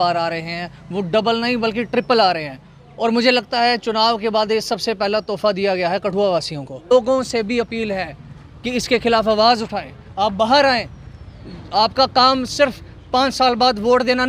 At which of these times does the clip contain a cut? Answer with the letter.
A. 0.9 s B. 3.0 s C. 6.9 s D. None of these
C